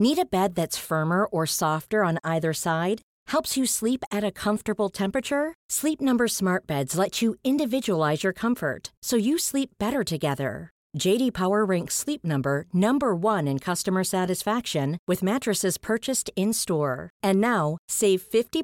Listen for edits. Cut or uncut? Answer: uncut